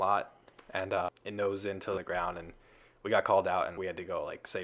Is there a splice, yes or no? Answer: yes